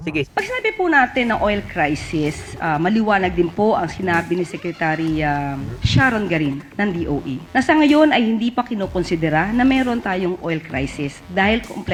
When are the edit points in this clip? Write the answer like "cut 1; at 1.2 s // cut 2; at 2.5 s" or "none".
none